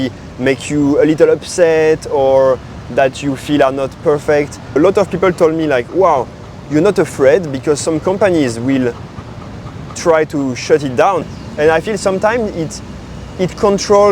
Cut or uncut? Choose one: cut